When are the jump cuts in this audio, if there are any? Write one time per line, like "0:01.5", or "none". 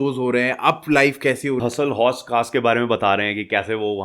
0:01.6